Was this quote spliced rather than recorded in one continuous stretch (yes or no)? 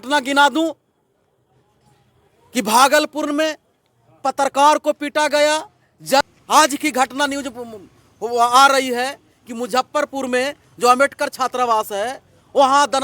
yes